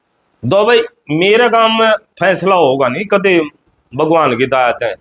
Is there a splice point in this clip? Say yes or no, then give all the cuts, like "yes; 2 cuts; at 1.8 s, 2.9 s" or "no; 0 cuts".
no; 0 cuts